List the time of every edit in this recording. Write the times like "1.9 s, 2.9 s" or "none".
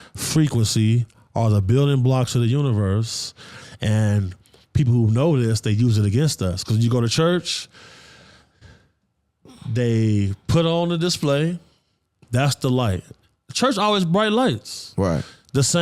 none